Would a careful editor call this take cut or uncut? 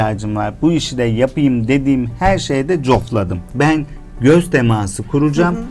uncut